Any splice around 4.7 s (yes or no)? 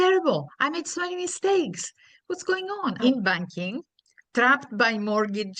no